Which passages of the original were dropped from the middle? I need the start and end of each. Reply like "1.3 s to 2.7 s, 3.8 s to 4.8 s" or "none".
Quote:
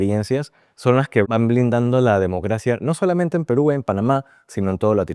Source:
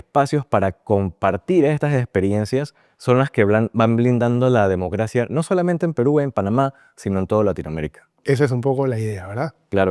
3.5 s to 3.7 s